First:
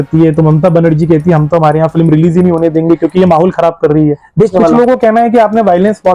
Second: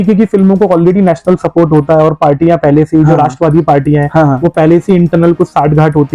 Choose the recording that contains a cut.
first; 1 cut; at 4.5 s

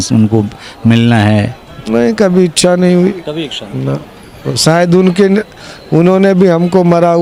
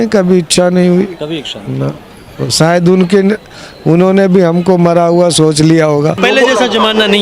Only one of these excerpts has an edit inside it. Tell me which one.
second; 1 cut; at 6.2 s

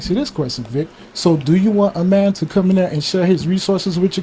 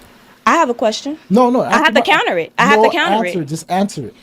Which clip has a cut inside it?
second; 1 cut; at 1.3 s

